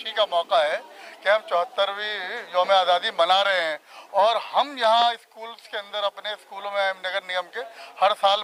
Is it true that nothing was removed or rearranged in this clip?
yes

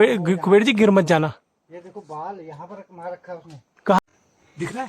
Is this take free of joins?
no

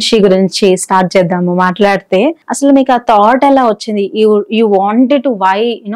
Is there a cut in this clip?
yes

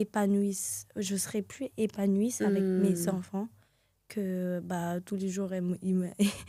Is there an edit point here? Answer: no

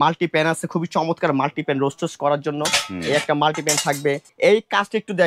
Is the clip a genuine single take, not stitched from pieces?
no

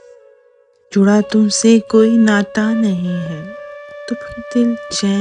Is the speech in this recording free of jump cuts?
yes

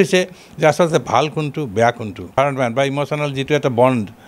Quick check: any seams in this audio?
yes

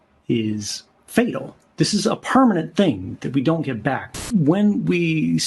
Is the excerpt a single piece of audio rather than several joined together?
no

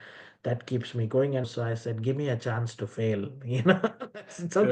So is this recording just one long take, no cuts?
no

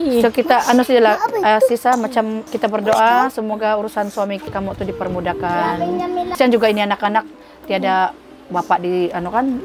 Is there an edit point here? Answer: yes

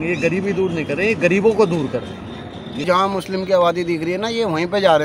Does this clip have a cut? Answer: yes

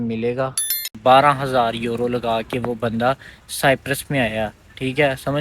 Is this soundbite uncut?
no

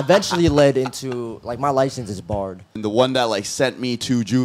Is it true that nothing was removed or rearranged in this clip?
no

